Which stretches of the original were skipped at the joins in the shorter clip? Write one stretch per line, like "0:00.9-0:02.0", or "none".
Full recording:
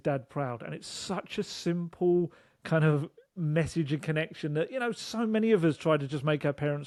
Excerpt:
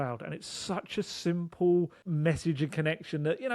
0:02.4-0:03.3

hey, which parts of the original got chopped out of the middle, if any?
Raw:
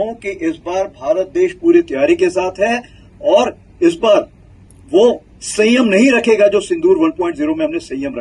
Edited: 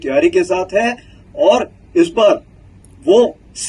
none

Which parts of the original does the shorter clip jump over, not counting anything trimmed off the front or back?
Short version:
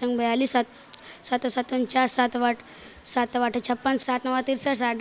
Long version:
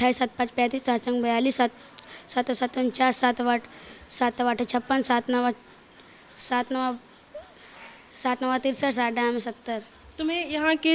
0:05.1-0:08.2

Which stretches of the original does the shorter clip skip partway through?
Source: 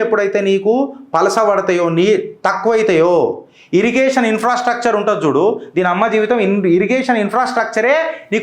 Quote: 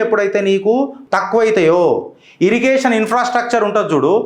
0:01.0-0:02.3

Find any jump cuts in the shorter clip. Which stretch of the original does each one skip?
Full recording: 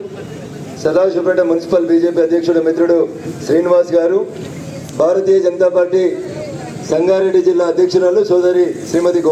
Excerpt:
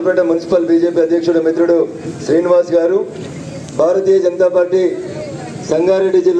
none

